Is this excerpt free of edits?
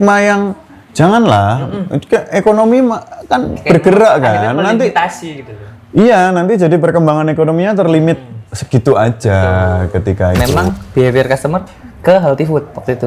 no; 1 cut; at 10.5 s

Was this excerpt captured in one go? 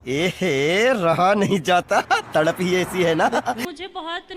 yes; 0 cuts

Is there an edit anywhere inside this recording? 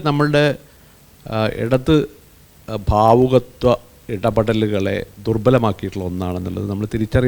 no; 0 cuts

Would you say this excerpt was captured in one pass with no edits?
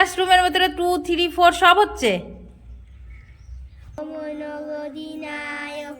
no; 1 cut; at 4.0 s

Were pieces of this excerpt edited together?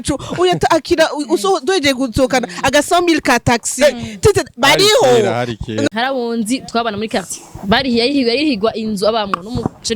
yes; 1 cut; at 5.8 s

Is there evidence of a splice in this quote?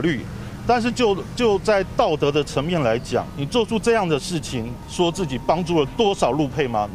yes; 2 cuts; at 3.4 s, 4.8 s

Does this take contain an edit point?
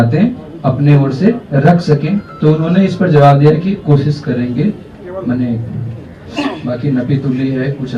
no; 0 cuts

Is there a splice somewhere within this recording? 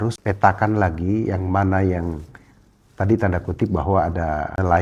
no; 0 cuts

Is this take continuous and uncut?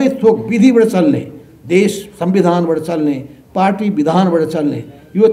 yes; 0 cuts

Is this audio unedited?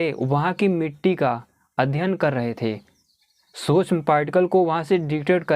yes; 0 cuts

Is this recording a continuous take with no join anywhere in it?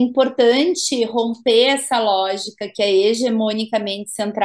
yes; 0 cuts

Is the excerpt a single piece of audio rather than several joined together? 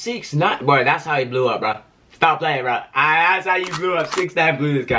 yes; 0 cuts

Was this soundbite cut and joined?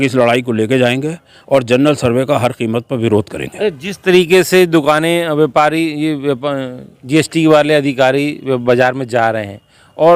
no; 0 cuts

